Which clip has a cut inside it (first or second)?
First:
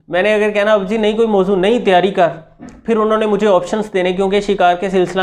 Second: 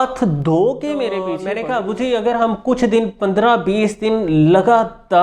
second